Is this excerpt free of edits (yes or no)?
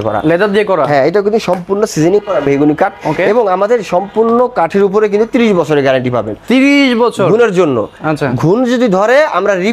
yes